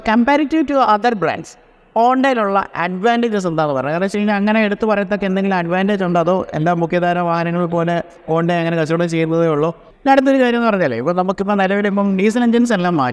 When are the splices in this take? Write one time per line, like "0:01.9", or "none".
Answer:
0:09.9